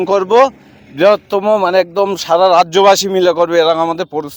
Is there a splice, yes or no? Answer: no